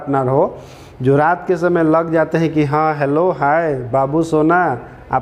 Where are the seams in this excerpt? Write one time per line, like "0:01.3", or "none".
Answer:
none